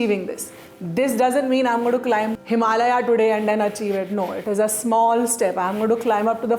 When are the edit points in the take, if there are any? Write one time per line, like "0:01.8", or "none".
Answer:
0:02.4